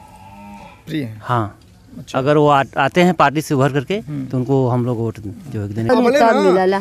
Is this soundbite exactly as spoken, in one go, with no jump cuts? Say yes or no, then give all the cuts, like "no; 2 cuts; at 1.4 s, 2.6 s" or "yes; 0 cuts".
no; 1 cut; at 5.9 s